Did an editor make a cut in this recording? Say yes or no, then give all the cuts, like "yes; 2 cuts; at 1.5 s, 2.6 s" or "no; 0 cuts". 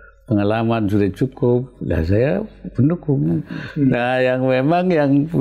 yes; 1 cut; at 3.6 s